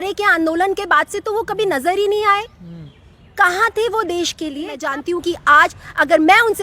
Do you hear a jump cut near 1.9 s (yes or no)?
no